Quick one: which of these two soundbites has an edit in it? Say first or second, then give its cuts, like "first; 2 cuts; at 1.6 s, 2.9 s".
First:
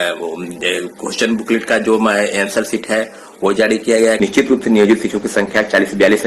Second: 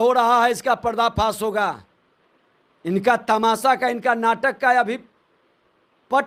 first; 1 cut; at 4.2 s